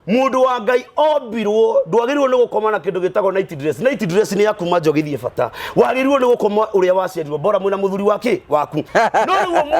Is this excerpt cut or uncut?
cut